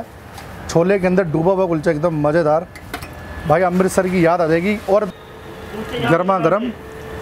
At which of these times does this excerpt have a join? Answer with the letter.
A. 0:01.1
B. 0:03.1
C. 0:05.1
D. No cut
C